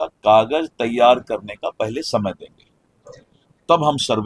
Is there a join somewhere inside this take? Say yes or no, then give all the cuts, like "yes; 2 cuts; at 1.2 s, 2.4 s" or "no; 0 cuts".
no; 0 cuts